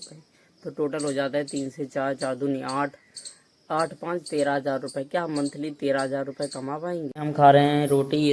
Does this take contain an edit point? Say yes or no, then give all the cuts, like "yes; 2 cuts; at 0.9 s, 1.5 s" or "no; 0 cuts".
yes; 1 cut; at 7.1 s